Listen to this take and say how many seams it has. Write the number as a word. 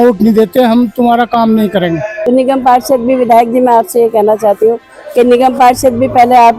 one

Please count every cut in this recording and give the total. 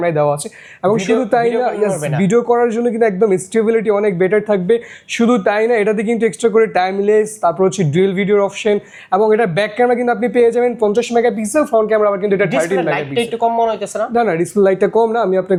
zero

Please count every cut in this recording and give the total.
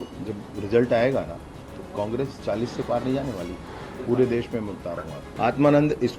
one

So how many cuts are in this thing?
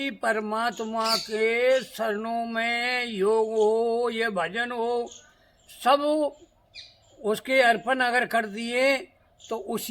zero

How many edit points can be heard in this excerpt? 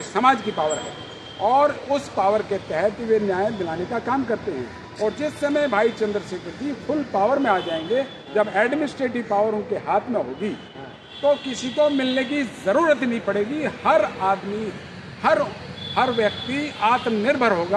zero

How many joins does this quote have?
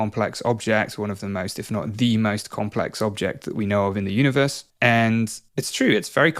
two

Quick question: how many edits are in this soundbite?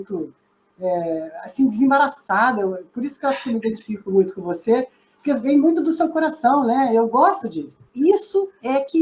one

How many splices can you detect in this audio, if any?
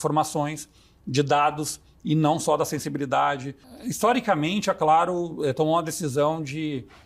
one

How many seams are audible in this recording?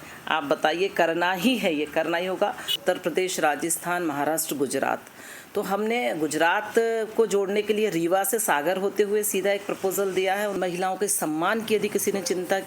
two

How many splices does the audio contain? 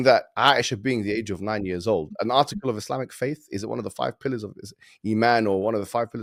zero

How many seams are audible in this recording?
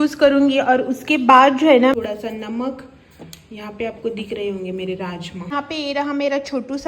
two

